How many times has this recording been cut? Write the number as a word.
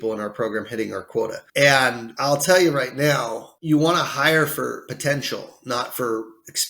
four